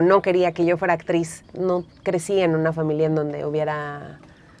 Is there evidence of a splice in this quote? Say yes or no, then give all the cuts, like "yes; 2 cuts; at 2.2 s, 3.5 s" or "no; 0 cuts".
yes; 1 cut; at 1.5 s